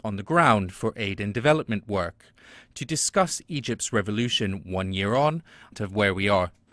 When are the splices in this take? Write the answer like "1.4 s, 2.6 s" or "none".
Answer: none

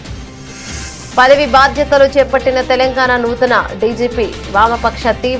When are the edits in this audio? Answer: 1.1 s

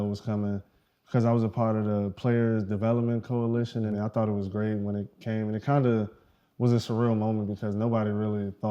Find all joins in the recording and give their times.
3.9 s

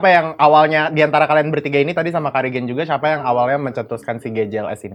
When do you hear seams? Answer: none

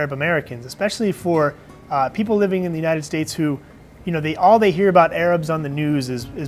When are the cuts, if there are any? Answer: none

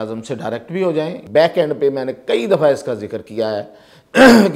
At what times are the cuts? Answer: 1.2 s

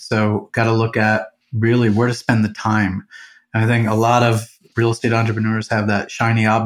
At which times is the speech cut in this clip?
1.4 s, 4.7 s

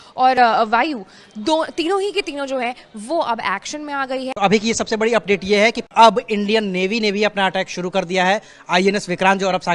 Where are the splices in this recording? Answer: 4.3 s

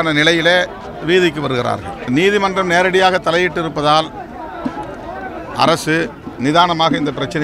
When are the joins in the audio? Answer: 2.0 s

